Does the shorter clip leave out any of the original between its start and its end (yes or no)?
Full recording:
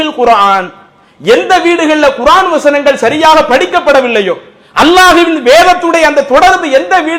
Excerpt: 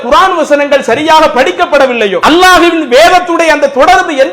yes